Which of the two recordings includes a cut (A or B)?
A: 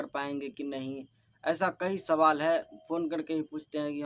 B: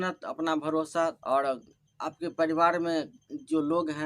B